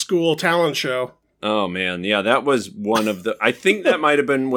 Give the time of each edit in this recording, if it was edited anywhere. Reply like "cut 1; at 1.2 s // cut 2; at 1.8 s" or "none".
none